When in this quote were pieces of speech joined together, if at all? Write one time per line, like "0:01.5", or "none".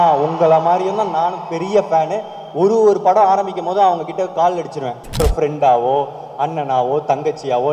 0:05.2